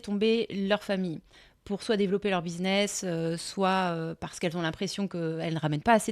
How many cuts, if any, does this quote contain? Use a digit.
0